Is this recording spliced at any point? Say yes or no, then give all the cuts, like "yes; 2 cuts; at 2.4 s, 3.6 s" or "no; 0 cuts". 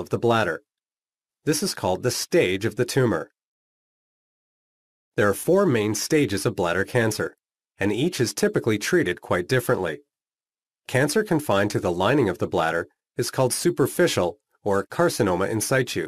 no; 0 cuts